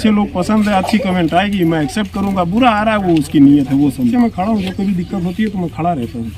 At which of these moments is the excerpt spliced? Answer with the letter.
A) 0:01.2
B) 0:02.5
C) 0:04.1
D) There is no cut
C